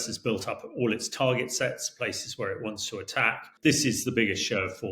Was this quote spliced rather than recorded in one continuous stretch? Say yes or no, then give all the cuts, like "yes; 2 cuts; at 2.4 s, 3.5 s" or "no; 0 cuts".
yes; 1 cut; at 3.5 s